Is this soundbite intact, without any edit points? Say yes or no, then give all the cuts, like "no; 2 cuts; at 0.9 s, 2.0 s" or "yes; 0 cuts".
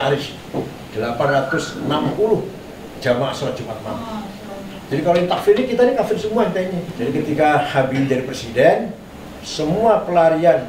no; 1 cut; at 6.9 s